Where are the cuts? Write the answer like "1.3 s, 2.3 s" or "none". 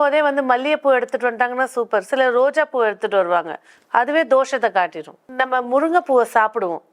5.3 s